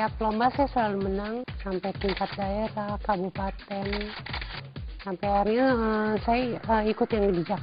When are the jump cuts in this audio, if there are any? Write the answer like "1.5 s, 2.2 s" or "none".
1.5 s